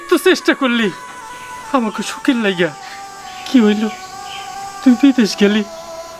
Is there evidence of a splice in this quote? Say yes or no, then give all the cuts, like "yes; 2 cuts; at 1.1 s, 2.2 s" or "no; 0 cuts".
no; 0 cuts